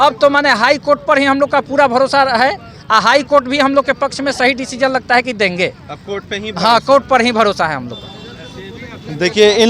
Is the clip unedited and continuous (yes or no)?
yes